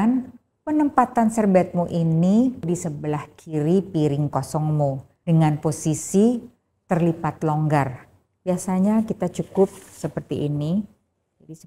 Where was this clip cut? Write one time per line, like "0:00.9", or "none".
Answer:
0:02.6
0:05.1